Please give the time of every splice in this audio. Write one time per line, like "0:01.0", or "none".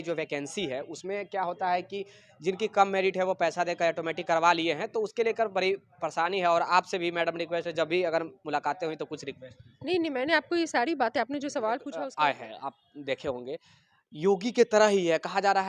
0:12.0